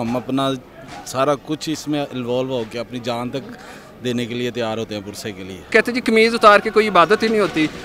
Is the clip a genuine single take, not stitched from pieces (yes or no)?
no